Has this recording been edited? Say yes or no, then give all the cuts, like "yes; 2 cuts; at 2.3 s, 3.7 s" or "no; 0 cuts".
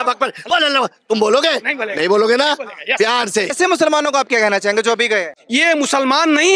yes; 2 cuts; at 3.5 s, 5.3 s